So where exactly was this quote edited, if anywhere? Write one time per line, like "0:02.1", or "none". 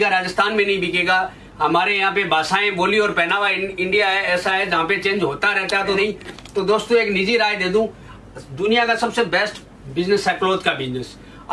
0:06.0